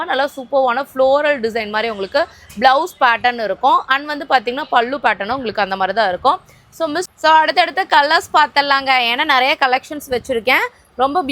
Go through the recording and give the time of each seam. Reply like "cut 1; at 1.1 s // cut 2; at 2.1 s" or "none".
cut 1; at 7.1 s